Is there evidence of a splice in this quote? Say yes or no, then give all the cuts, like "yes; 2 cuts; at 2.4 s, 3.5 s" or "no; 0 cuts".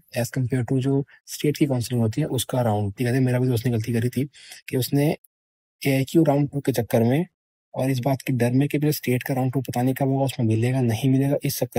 yes; 1 cut; at 2.9 s